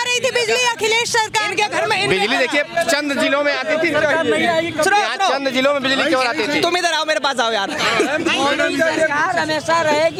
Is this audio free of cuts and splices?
yes; 0 cuts

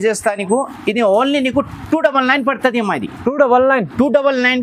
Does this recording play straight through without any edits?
yes; 0 cuts

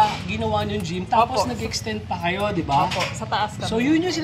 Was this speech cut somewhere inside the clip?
no; 0 cuts

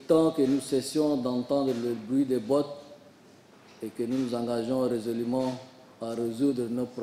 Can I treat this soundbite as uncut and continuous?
yes; 0 cuts

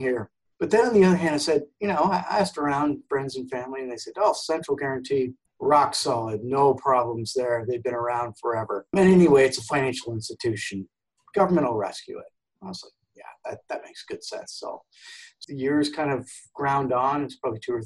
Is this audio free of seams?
no; 1 cut; at 15.4 s

